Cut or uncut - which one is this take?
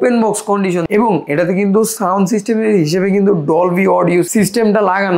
cut